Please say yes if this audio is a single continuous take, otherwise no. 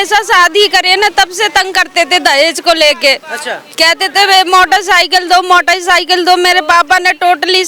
yes